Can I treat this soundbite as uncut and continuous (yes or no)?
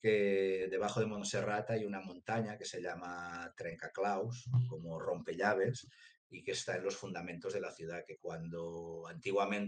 yes